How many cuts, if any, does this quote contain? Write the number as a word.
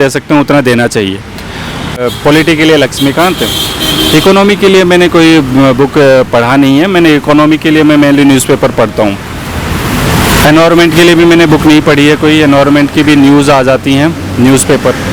one